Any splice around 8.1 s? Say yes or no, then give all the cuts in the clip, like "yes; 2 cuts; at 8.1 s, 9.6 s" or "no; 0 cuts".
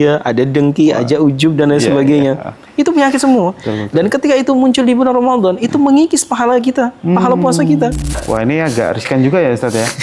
yes; 1 cut; at 8.1 s